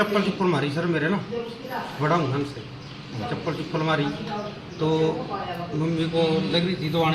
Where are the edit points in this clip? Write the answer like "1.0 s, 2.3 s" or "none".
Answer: none